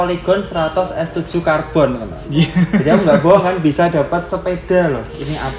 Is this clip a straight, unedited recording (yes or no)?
yes